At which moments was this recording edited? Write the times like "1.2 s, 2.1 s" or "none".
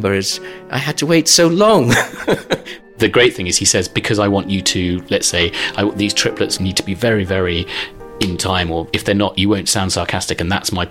2.9 s, 6.5 s, 8.9 s